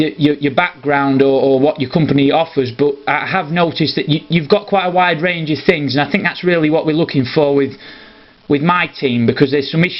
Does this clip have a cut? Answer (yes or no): yes